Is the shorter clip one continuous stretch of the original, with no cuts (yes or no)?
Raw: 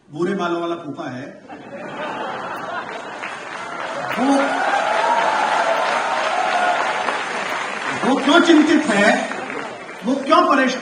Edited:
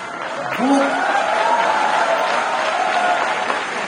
yes